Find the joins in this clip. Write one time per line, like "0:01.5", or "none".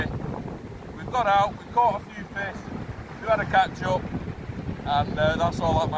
none